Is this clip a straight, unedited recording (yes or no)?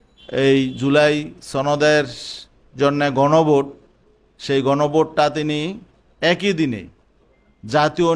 yes